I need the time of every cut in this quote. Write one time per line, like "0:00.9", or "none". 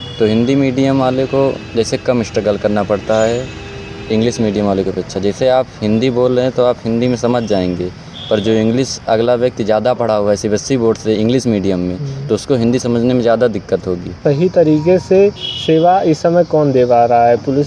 0:14.2